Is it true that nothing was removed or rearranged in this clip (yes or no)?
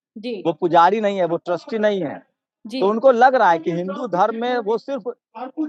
yes